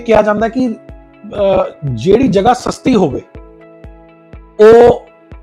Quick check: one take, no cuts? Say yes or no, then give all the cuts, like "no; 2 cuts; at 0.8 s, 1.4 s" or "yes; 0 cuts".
yes; 0 cuts